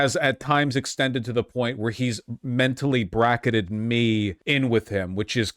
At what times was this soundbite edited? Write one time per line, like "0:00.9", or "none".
0:04.4